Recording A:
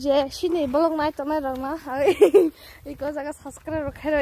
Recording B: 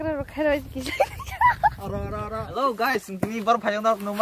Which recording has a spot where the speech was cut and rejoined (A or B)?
B